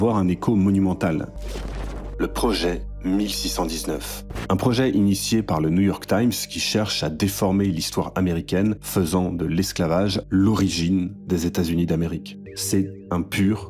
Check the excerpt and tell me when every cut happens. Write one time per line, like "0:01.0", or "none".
0:01.3
0:12.4